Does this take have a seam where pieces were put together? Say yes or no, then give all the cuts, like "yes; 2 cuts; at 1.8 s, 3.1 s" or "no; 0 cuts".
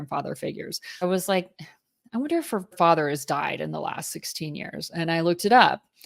yes; 2 cuts; at 1.0 s, 2.7 s